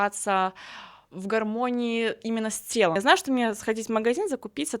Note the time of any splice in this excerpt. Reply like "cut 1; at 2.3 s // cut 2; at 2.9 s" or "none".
cut 1; at 3.0 s